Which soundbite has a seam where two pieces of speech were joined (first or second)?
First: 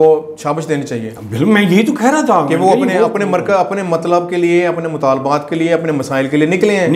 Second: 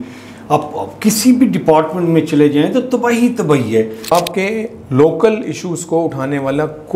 second